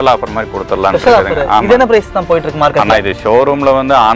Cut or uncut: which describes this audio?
uncut